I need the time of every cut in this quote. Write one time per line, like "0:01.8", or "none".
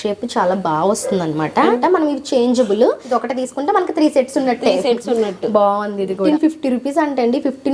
0:01.8
0:03.0
0:06.2